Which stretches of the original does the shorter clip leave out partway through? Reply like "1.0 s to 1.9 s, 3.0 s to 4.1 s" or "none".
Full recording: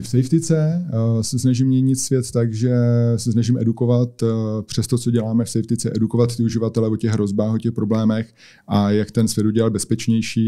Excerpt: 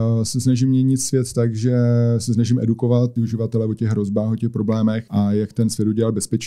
4.1 s to 6.3 s, 8.3 s to 8.6 s